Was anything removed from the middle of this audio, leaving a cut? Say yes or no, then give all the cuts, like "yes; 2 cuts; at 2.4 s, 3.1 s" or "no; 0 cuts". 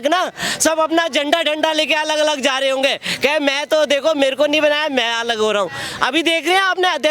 no; 0 cuts